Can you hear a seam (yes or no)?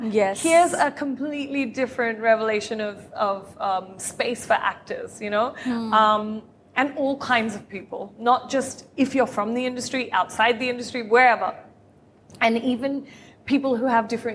no